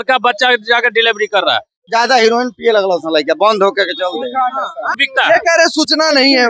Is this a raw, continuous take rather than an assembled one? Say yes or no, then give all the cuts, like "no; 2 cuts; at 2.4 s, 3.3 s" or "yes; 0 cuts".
no; 2 cuts; at 1.8 s, 5.1 s